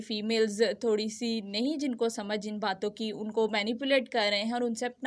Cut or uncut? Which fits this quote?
uncut